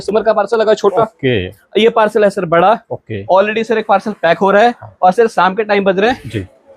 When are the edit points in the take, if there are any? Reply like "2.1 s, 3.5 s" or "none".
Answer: 1.6 s

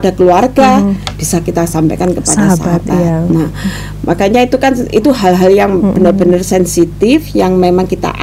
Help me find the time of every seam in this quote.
none

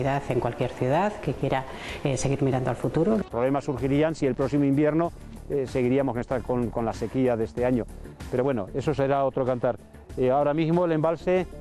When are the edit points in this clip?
3.2 s

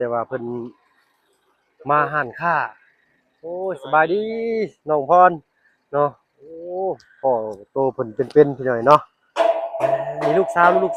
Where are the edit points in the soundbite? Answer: none

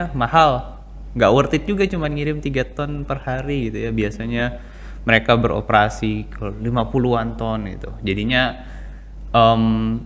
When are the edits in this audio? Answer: none

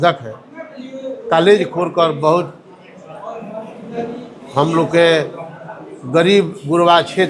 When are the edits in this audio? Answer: none

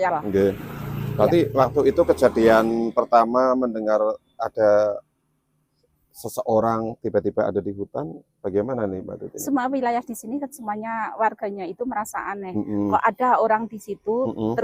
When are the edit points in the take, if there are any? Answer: none

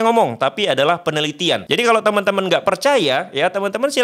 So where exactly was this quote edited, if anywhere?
1.6 s

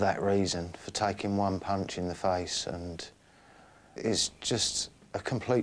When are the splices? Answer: 3.9 s

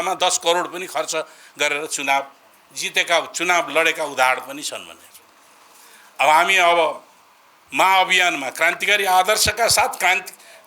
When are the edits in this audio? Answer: none

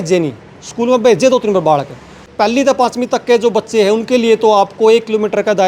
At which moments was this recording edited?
2.3 s

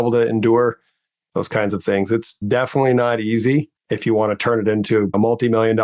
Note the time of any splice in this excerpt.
2.4 s, 3.8 s, 5.1 s

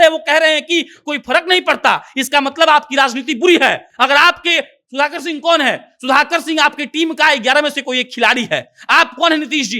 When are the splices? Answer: none

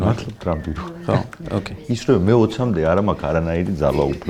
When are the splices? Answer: none

